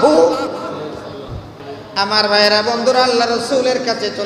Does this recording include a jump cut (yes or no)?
yes